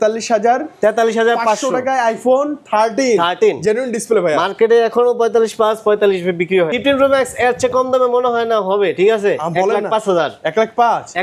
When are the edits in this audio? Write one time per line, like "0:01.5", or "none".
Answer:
0:06.7